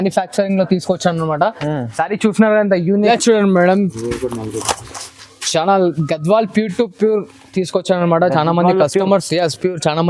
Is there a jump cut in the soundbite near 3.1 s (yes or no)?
yes